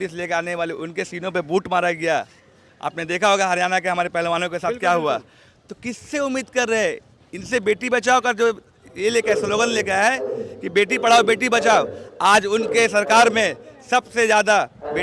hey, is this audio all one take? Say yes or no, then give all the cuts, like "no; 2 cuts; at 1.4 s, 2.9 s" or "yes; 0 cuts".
yes; 0 cuts